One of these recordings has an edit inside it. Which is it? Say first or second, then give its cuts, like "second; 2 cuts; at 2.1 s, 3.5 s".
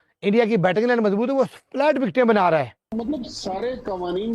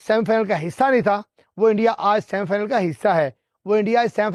first; 1 cut; at 2.9 s